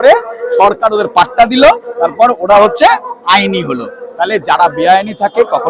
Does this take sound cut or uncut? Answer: uncut